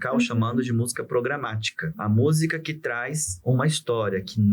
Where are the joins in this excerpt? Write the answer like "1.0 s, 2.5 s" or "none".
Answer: 2.0 s